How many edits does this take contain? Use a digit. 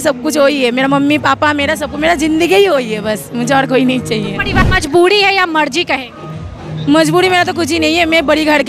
1